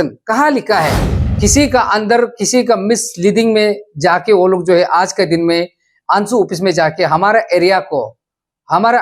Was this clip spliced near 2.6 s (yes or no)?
no